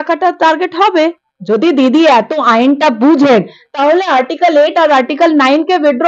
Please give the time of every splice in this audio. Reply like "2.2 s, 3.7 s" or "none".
1.3 s